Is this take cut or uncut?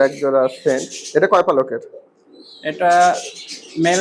uncut